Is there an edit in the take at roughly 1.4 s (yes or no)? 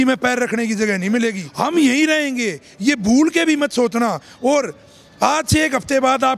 yes